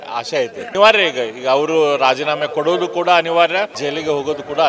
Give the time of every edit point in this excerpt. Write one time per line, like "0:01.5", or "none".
0:00.7
0:03.7